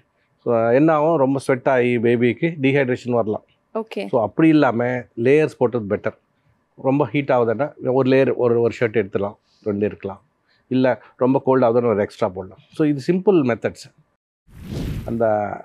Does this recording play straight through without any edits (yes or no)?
no